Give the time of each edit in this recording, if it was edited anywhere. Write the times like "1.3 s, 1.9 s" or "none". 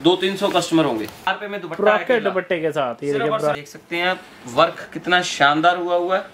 1.3 s, 3.5 s

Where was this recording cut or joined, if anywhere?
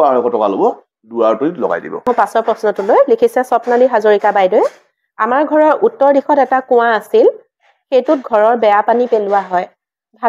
2.0 s

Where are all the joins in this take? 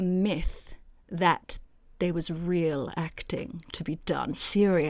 none

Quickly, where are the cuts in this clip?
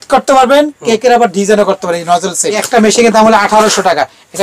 2.6 s

